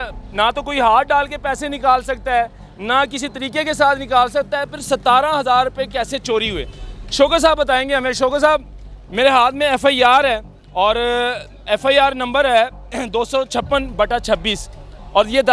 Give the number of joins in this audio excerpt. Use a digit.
0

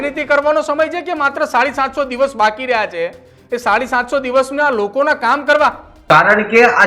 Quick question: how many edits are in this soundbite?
1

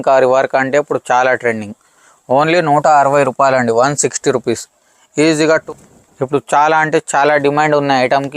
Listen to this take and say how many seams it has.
1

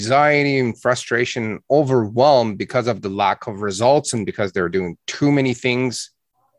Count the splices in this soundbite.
0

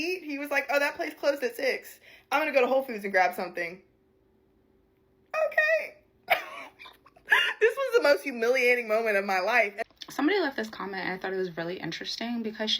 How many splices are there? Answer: 1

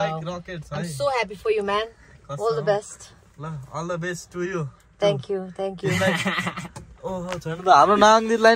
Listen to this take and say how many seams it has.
0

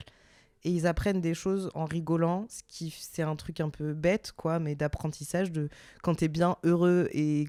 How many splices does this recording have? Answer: 0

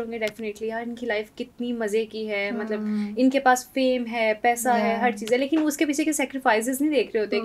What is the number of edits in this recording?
0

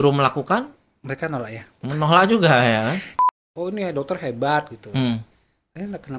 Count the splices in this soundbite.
1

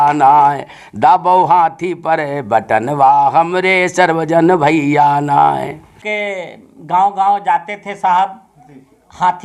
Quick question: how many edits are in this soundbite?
1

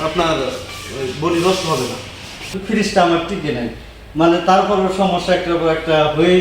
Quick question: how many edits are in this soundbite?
1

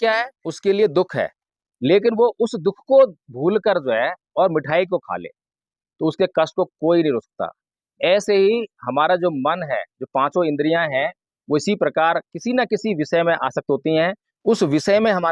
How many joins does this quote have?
0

